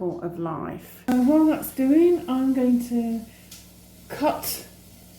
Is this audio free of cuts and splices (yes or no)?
no